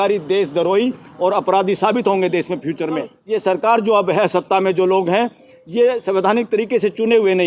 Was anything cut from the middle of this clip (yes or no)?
yes